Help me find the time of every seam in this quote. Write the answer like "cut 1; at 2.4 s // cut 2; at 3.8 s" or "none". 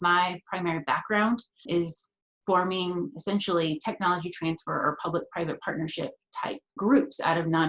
cut 1; at 1.7 s // cut 2; at 6.8 s